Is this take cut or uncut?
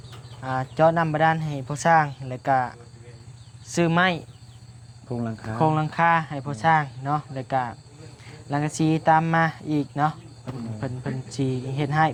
uncut